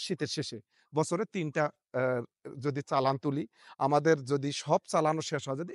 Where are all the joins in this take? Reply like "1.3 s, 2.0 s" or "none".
none